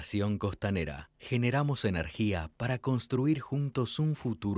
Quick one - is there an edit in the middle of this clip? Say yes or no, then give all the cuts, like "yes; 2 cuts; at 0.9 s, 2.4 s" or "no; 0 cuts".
no; 0 cuts